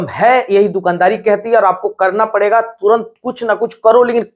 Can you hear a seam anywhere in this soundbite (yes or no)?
no